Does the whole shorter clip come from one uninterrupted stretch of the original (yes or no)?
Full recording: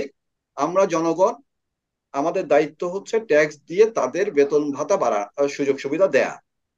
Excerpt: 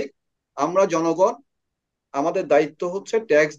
yes